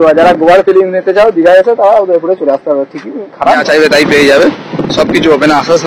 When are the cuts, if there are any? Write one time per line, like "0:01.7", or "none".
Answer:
0:03.6